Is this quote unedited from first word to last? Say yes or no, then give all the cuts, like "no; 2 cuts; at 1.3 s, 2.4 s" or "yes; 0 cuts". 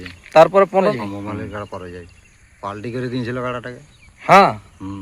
no; 1 cut; at 0.9 s